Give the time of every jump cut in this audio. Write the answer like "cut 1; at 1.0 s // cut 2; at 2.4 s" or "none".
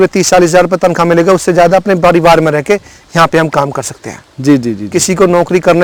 none